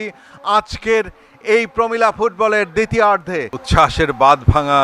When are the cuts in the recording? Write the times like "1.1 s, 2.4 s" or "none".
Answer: 3.6 s